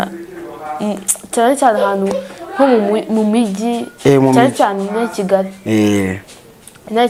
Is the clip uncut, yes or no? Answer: yes